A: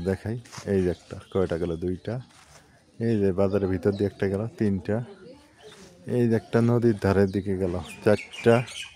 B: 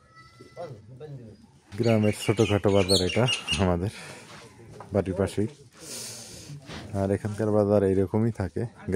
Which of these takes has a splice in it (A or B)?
B